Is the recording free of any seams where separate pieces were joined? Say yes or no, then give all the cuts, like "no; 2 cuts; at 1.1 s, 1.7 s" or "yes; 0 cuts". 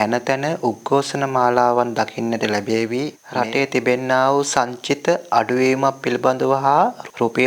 no; 1 cut; at 3.2 s